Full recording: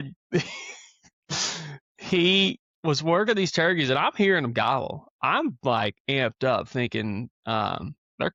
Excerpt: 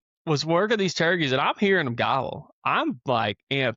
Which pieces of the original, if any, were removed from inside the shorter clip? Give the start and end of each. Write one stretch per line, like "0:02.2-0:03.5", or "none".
none